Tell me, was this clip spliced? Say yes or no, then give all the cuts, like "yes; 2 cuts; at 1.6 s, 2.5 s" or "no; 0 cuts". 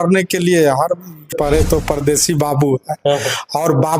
yes; 1 cut; at 1.3 s